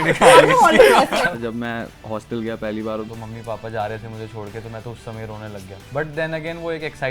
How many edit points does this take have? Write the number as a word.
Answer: two